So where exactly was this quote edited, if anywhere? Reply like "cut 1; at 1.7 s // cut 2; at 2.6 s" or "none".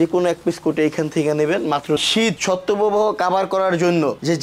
cut 1; at 2.0 s